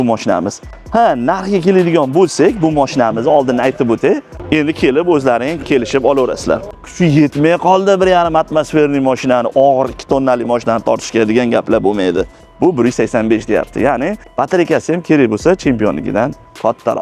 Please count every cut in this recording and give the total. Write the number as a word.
four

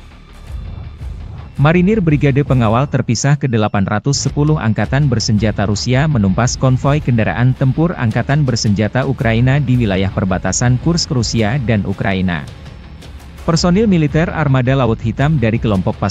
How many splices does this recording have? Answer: one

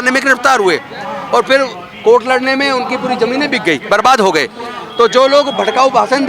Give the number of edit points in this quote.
zero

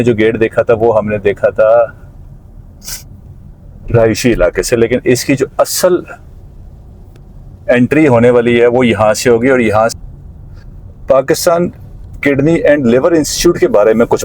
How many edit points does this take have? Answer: one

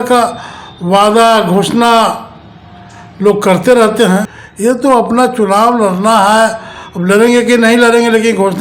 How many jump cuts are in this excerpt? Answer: one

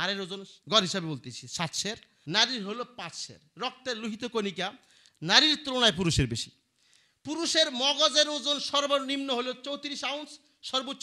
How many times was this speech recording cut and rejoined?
one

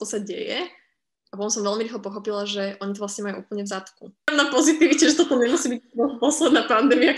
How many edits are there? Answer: one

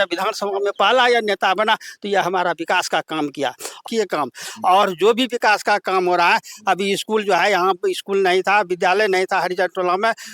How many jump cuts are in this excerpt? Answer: one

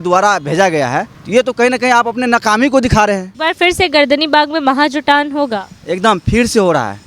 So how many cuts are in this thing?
two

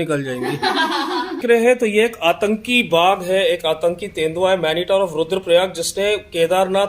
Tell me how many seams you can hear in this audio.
one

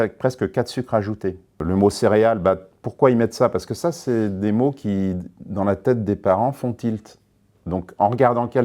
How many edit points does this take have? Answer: one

